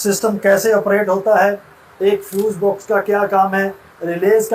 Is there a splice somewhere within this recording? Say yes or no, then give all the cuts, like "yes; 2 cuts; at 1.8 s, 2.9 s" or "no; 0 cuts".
no; 0 cuts